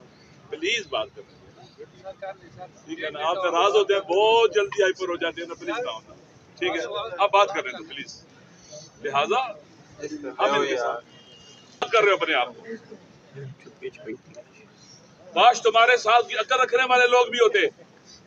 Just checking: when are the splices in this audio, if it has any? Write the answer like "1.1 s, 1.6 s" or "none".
11.9 s